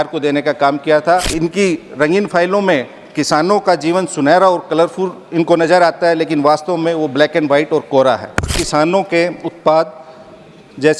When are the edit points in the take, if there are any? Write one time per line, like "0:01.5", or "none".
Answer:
0:01.3
0:08.5